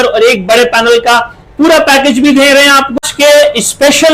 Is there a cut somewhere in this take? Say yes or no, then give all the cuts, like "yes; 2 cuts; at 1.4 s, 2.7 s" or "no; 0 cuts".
yes; 1 cut; at 3.0 s